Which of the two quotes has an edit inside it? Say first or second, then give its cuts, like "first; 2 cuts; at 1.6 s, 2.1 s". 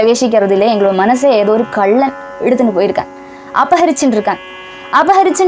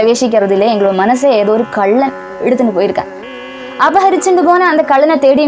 second; 1 cut; at 3.4 s